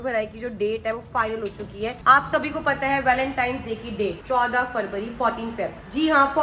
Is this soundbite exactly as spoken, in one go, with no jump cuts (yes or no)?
yes